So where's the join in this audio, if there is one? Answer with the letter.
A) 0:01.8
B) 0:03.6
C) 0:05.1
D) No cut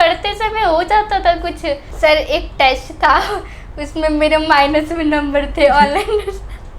A